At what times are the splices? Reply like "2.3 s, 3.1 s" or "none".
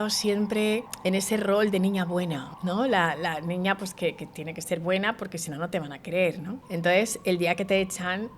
0.9 s, 2.5 s, 6.6 s